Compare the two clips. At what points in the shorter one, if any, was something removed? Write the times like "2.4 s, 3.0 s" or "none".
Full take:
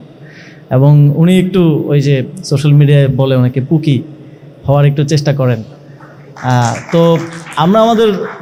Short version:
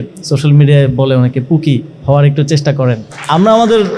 1.9 s, 3.1 s